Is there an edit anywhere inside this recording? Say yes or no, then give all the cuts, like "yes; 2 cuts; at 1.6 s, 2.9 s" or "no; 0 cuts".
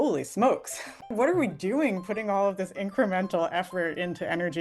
yes; 1 cut; at 1.1 s